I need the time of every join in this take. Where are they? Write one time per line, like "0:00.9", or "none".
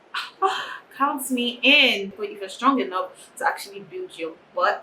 0:02.2